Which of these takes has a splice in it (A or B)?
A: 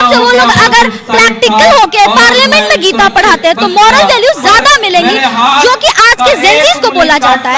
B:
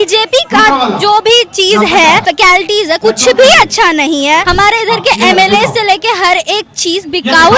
B